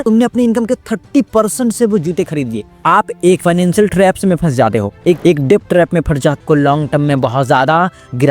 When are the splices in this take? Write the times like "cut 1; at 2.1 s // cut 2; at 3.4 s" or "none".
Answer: cut 1; at 2.7 s // cut 2; at 6.4 s